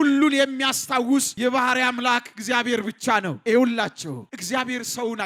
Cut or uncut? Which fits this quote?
cut